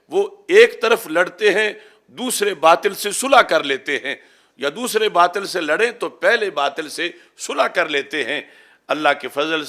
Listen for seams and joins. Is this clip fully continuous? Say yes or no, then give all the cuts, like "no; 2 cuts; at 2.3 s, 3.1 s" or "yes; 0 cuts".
yes; 0 cuts